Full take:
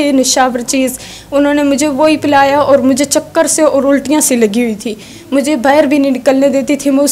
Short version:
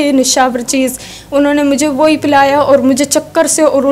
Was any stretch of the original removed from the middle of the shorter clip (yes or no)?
no